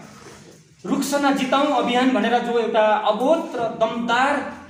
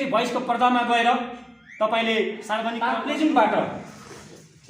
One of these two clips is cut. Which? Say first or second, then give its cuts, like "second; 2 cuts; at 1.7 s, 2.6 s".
second; 1 cut; at 2.9 s